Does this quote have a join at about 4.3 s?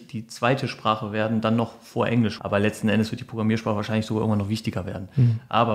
no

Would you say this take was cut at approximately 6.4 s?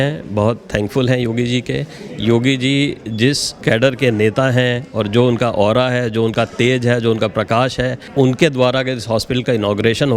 no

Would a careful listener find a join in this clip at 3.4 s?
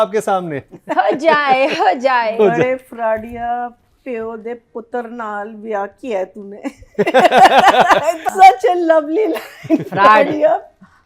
no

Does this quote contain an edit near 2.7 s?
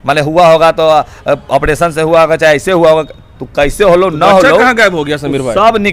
no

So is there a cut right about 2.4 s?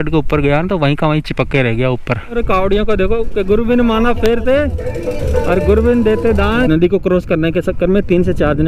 yes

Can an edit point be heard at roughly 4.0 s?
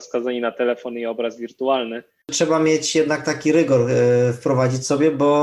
no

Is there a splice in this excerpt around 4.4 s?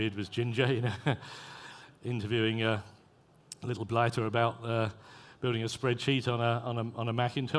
yes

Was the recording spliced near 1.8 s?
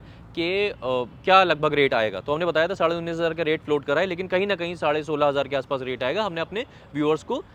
no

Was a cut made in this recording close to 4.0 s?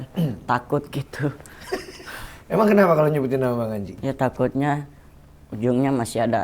yes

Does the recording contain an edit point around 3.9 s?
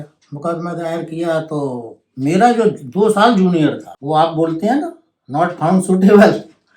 yes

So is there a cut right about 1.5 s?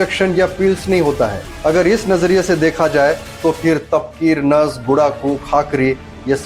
yes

